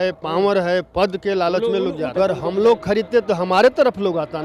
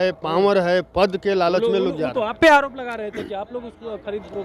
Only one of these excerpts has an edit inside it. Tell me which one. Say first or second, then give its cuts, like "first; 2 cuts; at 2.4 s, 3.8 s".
first; 1 cut; at 2.2 s